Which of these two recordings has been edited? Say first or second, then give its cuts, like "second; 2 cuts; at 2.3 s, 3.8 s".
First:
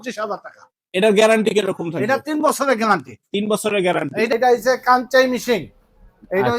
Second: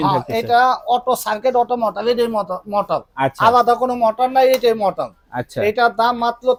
first; 1 cut; at 4.3 s